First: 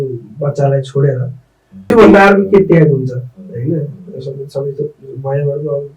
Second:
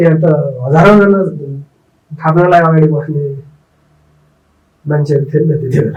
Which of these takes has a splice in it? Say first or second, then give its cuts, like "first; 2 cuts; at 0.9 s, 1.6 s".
first; 1 cut; at 1.9 s